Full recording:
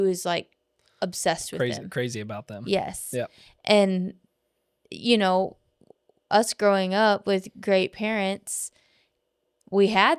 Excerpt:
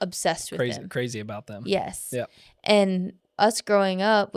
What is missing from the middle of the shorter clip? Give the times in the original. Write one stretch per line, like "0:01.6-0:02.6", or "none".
0:04.2-0:06.1

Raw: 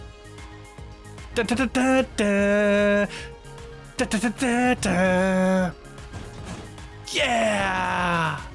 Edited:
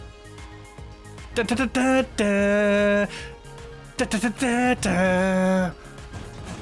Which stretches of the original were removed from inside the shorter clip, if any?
none

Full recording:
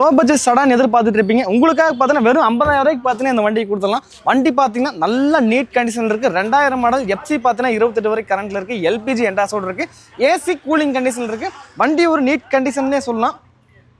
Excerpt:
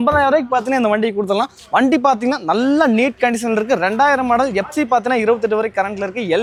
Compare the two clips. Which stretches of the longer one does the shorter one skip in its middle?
none

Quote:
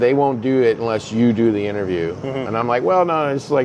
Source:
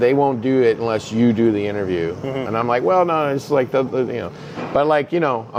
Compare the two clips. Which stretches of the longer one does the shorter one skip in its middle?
none

